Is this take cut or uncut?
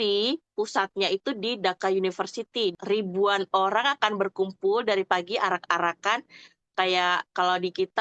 cut